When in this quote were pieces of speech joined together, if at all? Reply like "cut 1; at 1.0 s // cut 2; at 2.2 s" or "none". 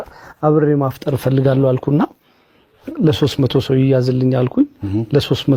none